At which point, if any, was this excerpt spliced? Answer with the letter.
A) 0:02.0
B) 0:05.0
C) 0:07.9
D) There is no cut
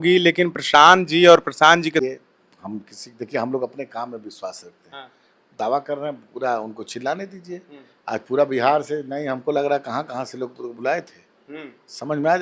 A